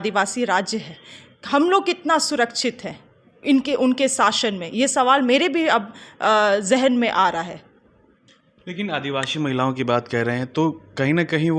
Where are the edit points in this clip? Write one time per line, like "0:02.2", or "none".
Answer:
none